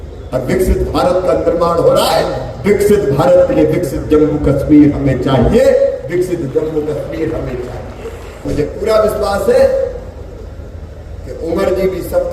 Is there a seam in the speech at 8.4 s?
yes; 1 cut; at 8.4 s

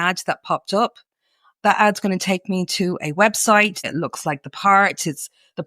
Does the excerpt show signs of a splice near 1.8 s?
no; 1 cut; at 3.9 s

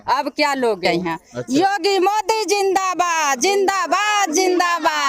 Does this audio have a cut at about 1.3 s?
yes; 1 cut; at 1.3 s

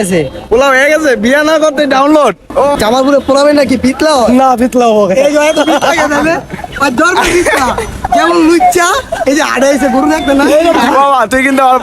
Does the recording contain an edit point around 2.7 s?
yes; 1 cut; at 2.7 s

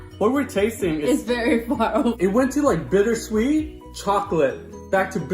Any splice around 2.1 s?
yes; 1 cut; at 2.1 s

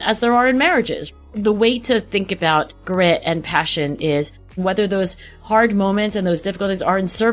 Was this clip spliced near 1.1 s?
yes; 3 cuts; at 1.1 s, 2.8 s, 4.6 s

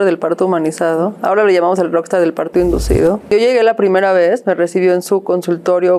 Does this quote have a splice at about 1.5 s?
no; 1 cut; at 3.3 s

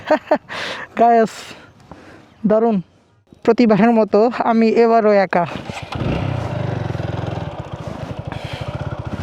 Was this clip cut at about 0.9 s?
no; 1 cut; at 3.3 s

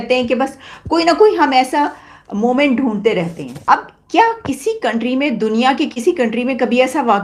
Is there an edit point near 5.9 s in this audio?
no; 1 cut; at 3.5 s

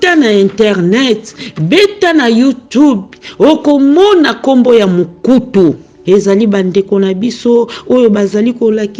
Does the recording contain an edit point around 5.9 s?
yes; 1 cut; at 5.9 s

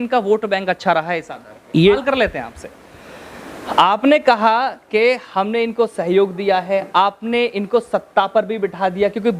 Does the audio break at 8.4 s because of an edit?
no; 1 cut; at 2.0 s

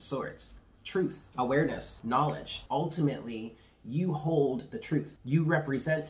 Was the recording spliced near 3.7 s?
no; 3 cuts; at 1.2 s, 2.5 s, 5.2 s

